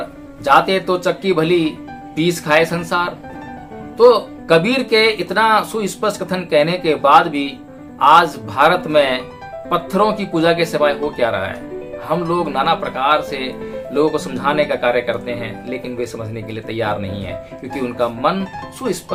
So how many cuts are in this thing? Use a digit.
0